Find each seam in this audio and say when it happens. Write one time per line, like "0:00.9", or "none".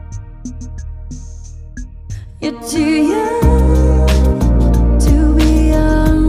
none